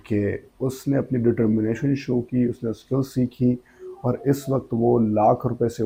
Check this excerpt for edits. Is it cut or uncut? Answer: uncut